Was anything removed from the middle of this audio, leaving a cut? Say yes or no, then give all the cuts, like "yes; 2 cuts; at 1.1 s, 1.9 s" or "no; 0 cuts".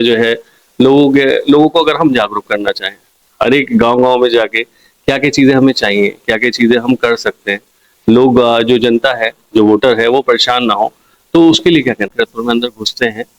yes; 1 cut; at 12.1 s